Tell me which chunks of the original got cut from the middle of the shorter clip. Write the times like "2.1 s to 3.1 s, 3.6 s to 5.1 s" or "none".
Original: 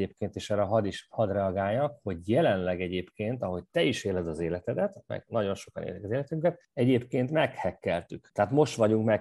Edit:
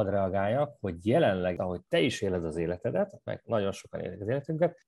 2.8 s to 3.4 s